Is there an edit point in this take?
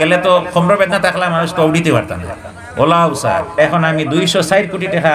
yes; 1 cut; at 3.5 s

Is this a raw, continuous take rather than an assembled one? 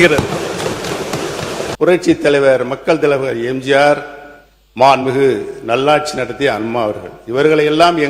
no; 1 cut; at 1.7 s

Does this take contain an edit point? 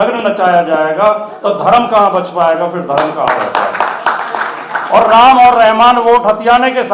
no; 0 cuts

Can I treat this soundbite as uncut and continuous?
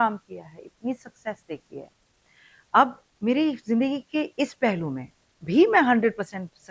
yes; 0 cuts

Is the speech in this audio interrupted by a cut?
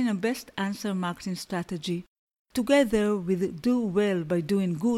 no; 0 cuts

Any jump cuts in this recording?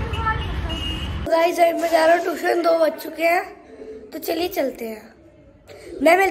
yes; 1 cut; at 1.1 s

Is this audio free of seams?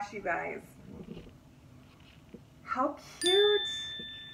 yes; 0 cuts

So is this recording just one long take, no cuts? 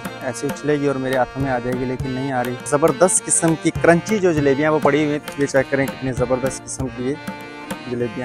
no; 2 cuts; at 2.7 s, 5.2 s

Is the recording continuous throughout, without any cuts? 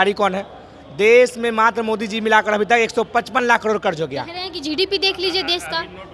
yes; 0 cuts

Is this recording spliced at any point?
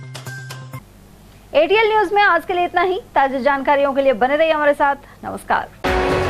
no; 0 cuts

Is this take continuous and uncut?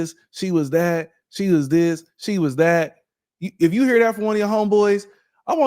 yes; 0 cuts

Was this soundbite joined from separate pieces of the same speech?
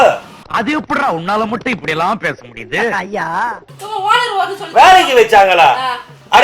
yes; 1 cut; at 3.7 s

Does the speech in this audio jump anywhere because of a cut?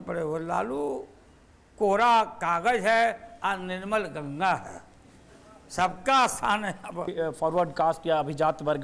yes; 1 cut; at 7.1 s

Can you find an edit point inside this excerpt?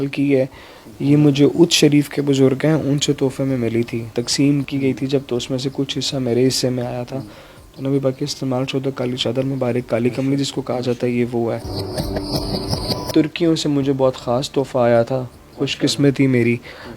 no; 0 cuts

